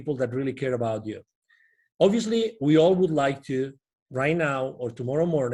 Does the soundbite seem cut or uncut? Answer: uncut